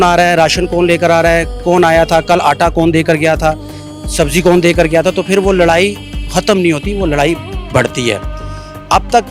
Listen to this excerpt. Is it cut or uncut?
uncut